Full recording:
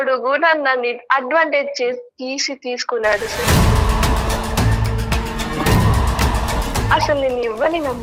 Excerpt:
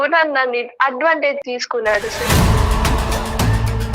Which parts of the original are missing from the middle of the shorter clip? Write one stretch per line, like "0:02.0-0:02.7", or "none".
0:01.7-0:02.6

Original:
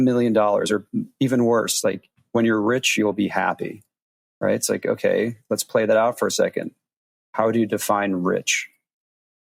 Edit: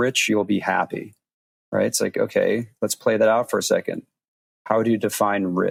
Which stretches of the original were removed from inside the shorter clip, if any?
none

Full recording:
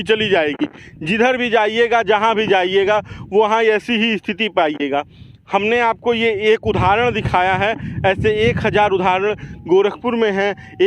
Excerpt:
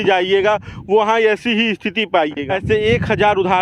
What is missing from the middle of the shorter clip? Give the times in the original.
0:04.9-0:08.0

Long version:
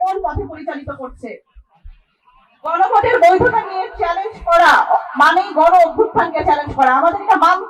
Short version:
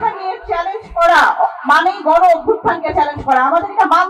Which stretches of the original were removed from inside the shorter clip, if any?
none

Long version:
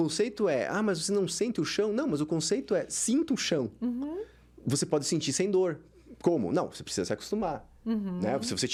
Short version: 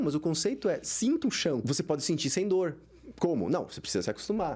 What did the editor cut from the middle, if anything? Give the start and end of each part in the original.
0:03.7-0:04.7

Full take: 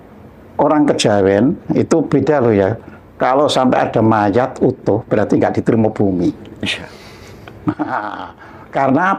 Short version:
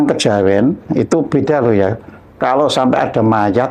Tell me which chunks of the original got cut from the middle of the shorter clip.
none

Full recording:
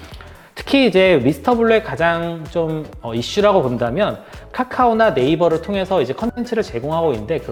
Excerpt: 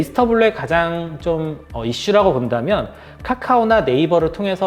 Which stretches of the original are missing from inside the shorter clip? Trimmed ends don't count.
none

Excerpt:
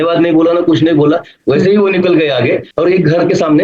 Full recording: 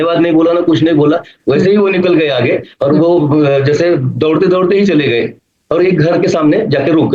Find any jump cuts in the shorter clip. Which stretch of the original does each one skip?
0:02.7-0:05.6

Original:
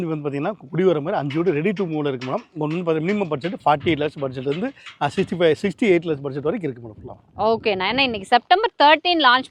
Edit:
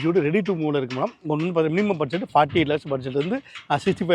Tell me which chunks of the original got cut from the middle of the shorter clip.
none

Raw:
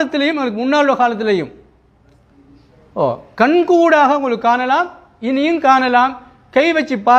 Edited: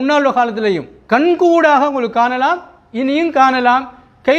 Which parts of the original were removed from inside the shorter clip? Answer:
0:01.6-0:03.2

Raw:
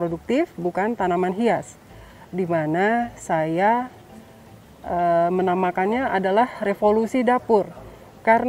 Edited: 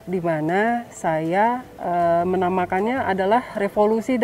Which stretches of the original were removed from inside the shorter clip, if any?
0:04.0-0:04.8

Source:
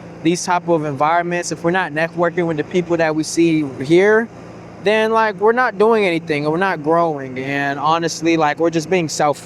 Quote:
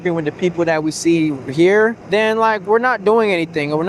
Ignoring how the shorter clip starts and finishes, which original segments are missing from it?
0:04.3-0:04.7

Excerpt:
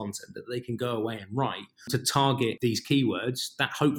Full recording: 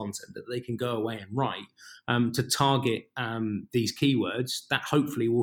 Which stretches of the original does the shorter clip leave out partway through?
0:01.9-0:02.3
0:03.0-0:03.7

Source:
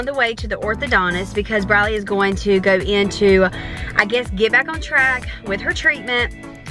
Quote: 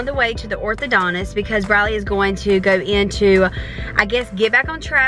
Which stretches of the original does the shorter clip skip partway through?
none

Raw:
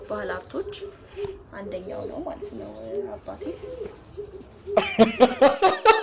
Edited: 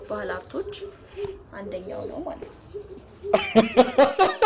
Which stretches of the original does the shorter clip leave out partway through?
0:02.4-0:03.8

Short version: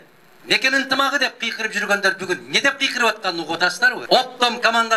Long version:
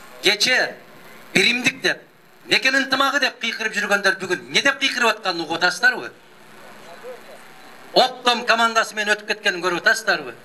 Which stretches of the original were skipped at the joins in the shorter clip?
0:06.0-0:07.8

